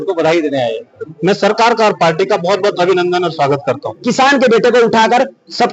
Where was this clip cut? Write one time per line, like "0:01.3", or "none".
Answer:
0:01.0
0:04.1